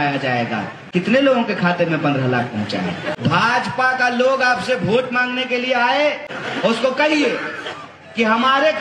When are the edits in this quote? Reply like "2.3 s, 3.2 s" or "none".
3.2 s, 6.4 s